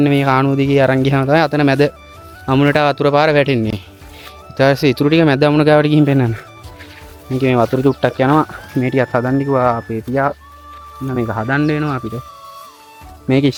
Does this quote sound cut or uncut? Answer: uncut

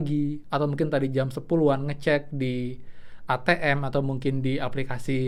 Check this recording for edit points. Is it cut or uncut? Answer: uncut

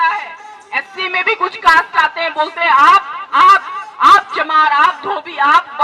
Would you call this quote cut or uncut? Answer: uncut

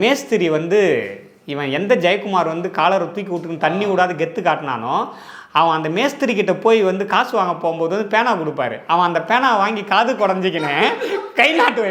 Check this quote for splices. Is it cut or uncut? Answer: uncut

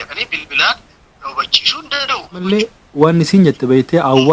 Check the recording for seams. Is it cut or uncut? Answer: cut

